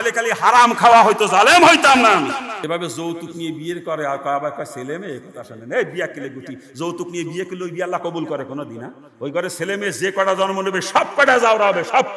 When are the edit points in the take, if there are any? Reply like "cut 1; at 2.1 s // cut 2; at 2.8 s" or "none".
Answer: cut 1; at 2.6 s